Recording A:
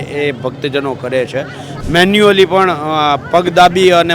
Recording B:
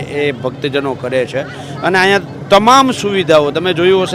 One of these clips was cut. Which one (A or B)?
A